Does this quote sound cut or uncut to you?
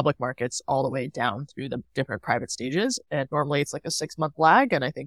cut